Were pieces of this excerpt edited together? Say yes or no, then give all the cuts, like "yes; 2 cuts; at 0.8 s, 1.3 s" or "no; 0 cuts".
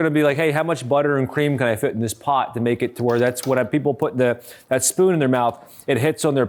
no; 0 cuts